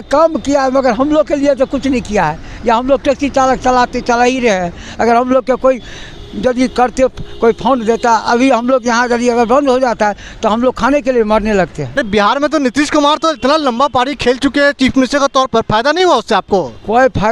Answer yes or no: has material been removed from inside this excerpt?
yes